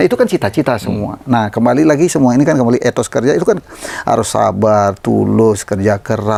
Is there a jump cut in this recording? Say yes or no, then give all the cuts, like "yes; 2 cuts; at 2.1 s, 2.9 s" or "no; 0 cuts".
no; 0 cuts